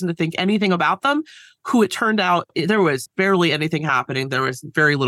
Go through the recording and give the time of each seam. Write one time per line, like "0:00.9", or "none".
0:03.1